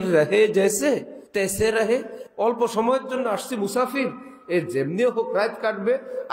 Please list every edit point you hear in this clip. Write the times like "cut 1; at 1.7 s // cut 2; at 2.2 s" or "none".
cut 1; at 1.2 s // cut 2; at 2.2 s